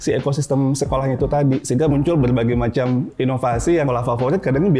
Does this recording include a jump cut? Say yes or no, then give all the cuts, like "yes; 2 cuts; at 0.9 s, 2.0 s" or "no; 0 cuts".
yes; 2 cuts; at 1.9 s, 3.9 s